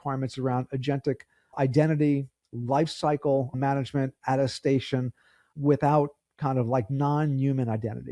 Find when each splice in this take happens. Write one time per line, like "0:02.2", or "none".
0:01.5
0:03.5
0:05.4